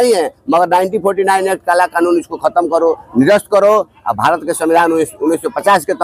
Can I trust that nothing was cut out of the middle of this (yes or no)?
yes